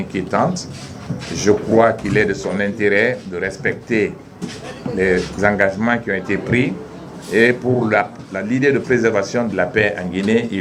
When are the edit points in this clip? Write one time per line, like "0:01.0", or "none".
none